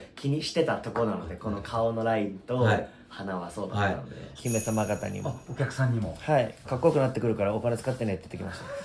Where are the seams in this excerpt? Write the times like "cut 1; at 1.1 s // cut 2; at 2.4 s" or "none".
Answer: cut 1; at 4.4 s // cut 2; at 6.8 s